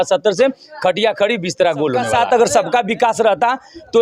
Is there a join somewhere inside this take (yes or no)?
yes